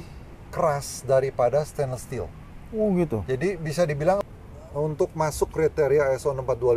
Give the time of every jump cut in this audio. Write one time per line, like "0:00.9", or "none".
0:04.2